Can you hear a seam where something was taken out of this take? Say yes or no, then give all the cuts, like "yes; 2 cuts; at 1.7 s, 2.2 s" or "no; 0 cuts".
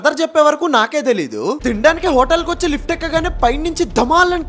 yes; 1 cut; at 1.5 s